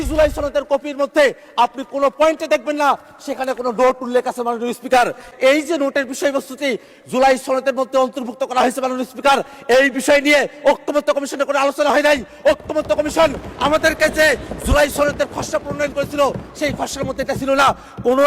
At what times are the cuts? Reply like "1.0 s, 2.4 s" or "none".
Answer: 5.3 s